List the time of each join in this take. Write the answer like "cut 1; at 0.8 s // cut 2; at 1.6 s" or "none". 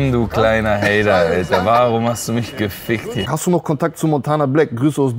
cut 1; at 3.3 s